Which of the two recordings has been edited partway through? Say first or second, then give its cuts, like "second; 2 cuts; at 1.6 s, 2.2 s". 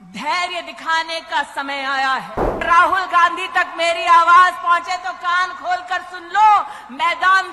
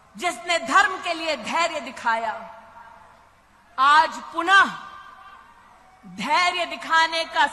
first; 1 cut; at 2.6 s